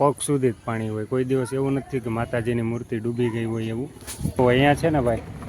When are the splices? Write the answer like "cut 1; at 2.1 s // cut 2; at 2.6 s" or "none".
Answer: cut 1; at 4.4 s